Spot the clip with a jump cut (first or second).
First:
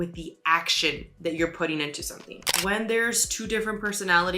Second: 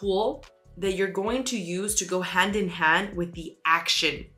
first